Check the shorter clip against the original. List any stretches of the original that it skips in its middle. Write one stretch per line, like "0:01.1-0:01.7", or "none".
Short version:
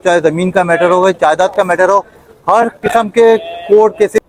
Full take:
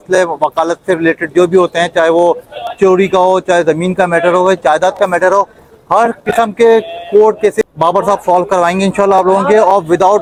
none